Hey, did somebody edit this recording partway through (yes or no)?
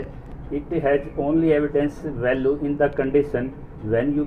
no